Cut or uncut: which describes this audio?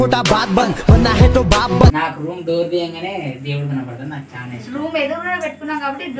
cut